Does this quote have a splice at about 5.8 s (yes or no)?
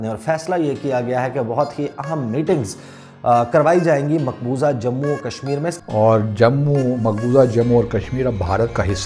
yes